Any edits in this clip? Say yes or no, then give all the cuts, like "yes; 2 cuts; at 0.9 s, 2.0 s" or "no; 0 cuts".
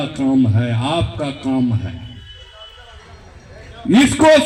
no; 0 cuts